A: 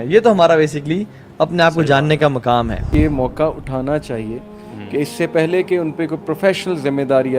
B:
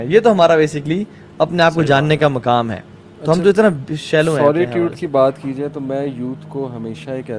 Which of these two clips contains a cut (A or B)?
A